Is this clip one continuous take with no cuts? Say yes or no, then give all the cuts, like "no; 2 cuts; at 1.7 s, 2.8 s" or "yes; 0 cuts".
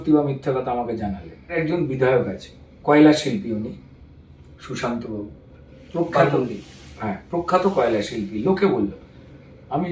no; 1 cut; at 1.5 s